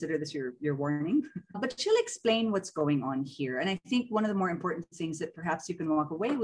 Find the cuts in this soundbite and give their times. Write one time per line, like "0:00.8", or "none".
0:01.6